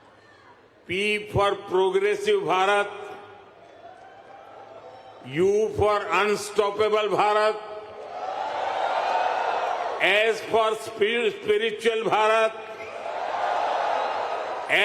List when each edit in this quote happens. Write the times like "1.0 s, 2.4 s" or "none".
1.6 s